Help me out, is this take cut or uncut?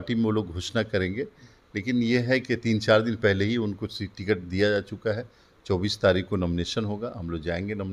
uncut